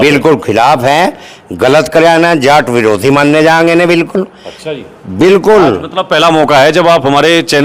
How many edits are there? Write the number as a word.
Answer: zero